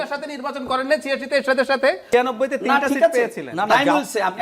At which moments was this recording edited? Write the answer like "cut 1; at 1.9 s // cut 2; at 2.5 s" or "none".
cut 1; at 2.0 s